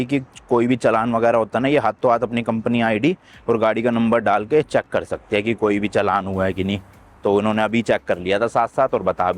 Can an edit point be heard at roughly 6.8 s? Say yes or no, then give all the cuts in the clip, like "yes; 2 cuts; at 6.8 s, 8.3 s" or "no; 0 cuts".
no; 0 cuts